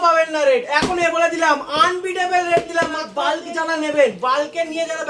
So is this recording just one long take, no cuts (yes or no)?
no